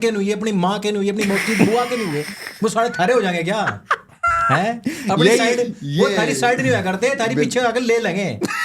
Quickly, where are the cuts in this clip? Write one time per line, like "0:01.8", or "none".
none